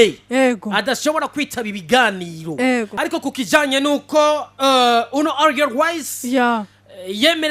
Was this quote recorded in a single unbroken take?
no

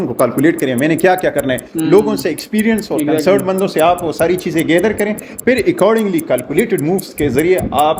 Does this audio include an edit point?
no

